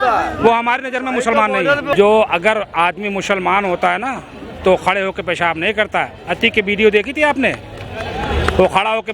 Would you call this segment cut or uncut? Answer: cut